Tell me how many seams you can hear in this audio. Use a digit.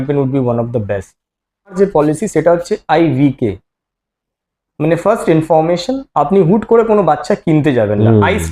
1